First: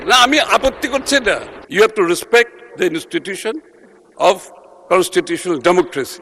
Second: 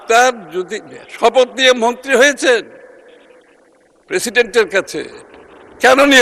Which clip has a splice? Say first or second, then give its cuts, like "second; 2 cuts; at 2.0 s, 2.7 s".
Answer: first; 1 cut; at 1.6 s